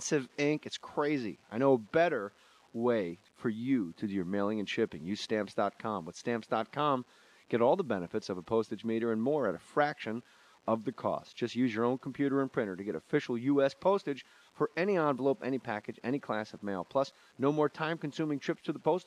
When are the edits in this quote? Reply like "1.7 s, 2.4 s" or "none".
none